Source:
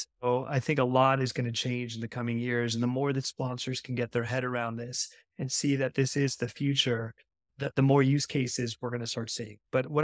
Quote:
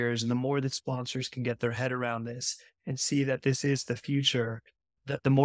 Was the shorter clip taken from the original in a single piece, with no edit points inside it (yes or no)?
yes